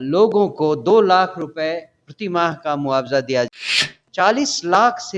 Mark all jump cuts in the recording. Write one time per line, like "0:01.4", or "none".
0:03.5